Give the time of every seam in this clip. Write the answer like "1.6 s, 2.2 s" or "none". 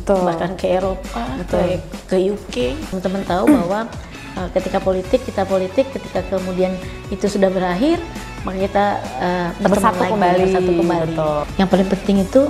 2.9 s, 11.4 s